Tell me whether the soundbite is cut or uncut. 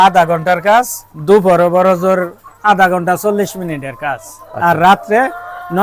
uncut